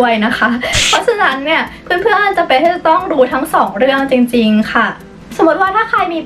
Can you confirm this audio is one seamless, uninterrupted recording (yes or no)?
yes